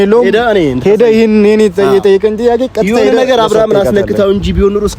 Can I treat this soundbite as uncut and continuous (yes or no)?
yes